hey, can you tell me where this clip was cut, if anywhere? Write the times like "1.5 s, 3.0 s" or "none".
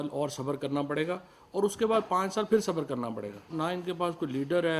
3.5 s